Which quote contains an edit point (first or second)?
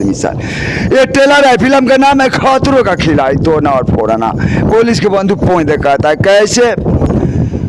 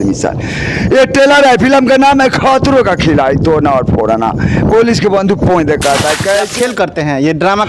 second